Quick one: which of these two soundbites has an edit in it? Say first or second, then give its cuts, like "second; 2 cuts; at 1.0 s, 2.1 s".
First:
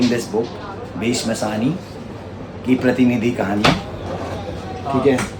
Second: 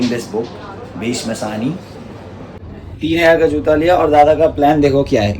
second; 1 cut; at 2.6 s